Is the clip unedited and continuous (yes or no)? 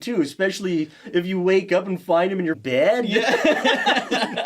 no